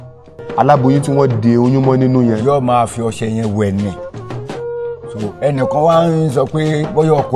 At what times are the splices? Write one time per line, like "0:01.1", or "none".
0:03.9
0:05.1